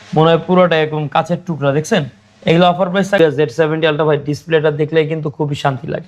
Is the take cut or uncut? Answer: cut